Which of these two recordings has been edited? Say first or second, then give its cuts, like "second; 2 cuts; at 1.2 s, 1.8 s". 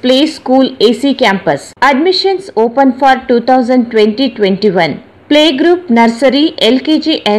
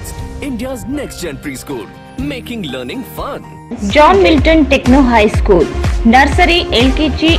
first; 1 cut; at 1.7 s